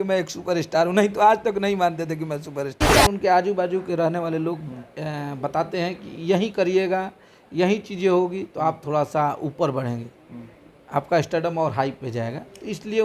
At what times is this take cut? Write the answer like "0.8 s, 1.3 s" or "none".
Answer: 2.8 s